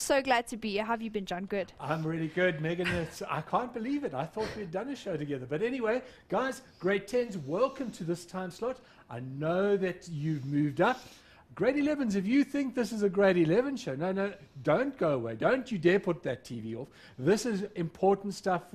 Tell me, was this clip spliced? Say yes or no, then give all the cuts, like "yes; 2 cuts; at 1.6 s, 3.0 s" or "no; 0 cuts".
no; 0 cuts